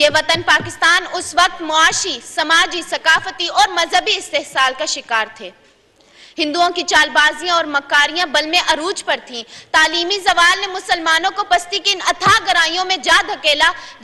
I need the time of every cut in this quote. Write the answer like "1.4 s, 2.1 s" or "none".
none

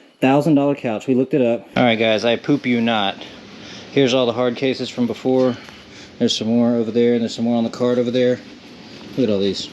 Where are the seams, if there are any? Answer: 1.7 s

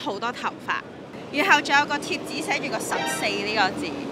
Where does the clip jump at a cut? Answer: none

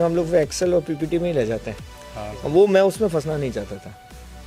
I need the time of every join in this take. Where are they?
none

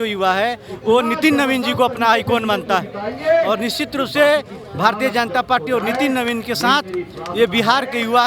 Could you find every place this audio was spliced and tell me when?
none

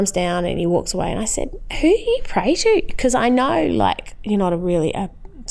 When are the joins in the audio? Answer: 4.1 s

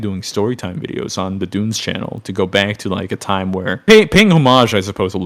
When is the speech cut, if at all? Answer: none

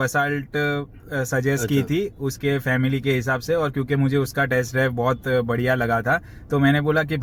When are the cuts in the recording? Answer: none

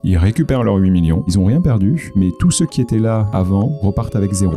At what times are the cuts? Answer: 1.3 s, 2.1 s, 3.5 s

